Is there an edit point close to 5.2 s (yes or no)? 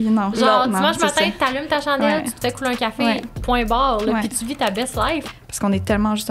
yes